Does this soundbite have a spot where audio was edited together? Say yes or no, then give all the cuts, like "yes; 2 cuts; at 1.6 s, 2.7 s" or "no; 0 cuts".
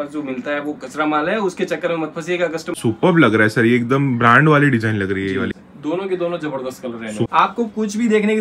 yes; 3 cuts; at 2.8 s, 5.6 s, 7.3 s